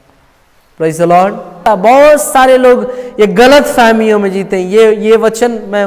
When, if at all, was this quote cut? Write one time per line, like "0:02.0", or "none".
0:01.6